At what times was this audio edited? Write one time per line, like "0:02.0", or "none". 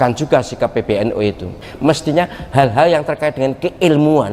0:01.7